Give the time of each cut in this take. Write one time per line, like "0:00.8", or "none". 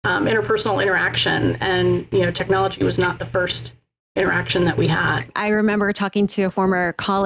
0:05.3